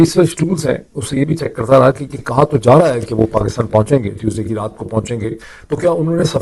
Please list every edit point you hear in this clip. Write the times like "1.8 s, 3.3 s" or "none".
5.5 s